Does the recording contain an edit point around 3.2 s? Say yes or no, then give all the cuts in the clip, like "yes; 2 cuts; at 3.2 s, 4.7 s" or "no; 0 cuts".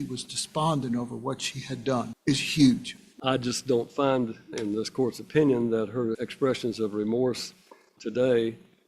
yes; 2 cuts; at 2.1 s, 3.2 s